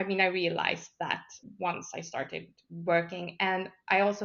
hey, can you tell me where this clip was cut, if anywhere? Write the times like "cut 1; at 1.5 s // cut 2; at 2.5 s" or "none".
cut 1; at 1.4 s